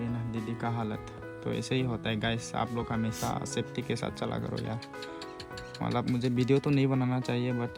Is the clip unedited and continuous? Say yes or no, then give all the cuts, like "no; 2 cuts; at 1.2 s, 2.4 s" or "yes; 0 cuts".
yes; 0 cuts